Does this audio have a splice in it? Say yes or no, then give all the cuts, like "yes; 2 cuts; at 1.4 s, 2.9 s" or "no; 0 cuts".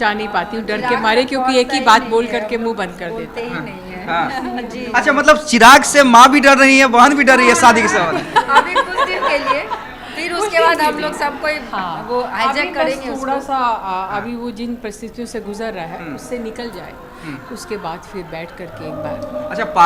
no; 0 cuts